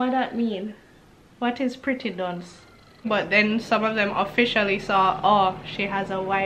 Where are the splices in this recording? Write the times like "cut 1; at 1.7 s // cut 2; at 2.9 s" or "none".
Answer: cut 1; at 3.1 s